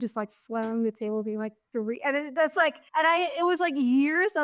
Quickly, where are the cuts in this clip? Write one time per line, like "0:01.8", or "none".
0:02.8

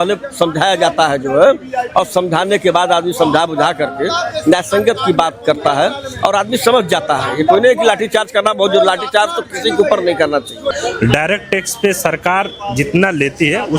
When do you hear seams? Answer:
0:10.7

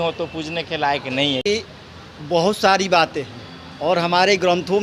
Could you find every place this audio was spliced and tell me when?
0:01.4

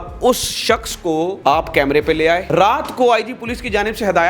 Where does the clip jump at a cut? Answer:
0:01.4
0:02.4

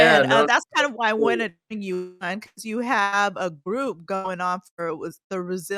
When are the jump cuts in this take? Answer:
none

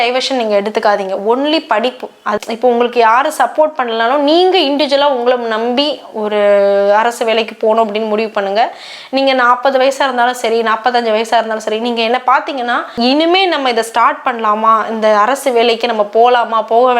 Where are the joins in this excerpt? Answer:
0:02.3
0:12.9

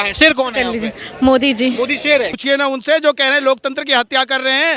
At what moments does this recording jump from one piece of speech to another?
0:02.4

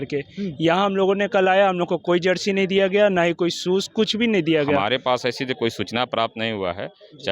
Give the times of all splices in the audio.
0:04.8

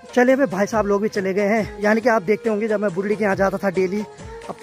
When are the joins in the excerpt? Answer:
0:01.7

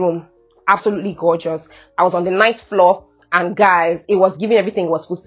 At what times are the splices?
none

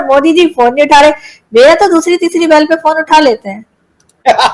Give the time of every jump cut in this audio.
none

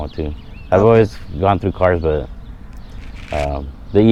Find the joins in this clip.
none

